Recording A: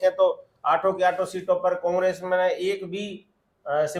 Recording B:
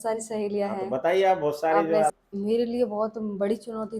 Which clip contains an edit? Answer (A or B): B